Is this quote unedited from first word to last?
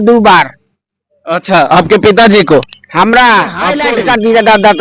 no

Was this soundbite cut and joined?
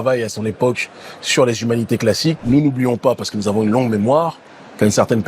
yes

